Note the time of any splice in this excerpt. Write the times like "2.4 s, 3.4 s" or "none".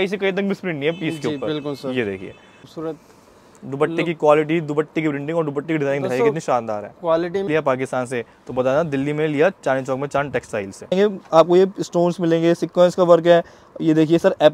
2.7 s, 7.5 s, 10.9 s